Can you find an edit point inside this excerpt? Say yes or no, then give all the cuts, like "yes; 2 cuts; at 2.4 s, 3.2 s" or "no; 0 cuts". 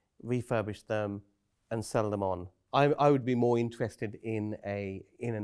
yes; 1 cut; at 2.5 s